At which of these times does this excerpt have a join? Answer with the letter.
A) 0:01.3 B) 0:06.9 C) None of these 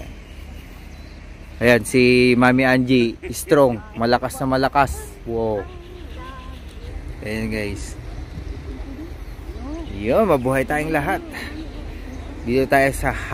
B